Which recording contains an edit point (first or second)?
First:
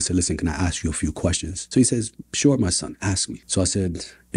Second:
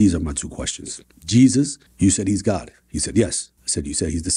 first